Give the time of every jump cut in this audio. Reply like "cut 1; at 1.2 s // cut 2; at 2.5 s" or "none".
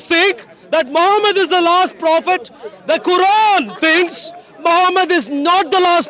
none